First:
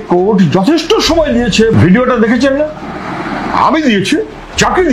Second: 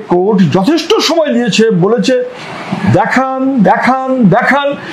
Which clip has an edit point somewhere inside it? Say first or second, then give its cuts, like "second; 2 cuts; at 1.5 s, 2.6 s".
first; 1 cut; at 1.7 s